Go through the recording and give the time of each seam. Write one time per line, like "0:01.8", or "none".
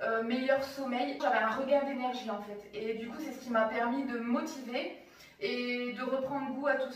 0:01.2

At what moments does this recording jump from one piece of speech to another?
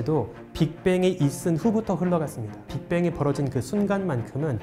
0:02.6

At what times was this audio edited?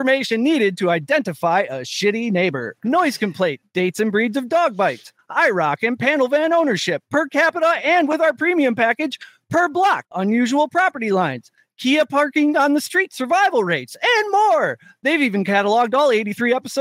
0:02.7
0:03.6
0:10.1

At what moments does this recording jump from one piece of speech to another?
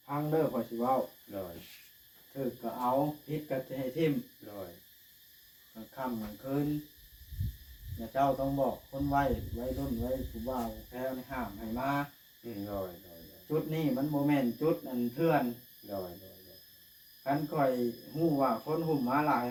none

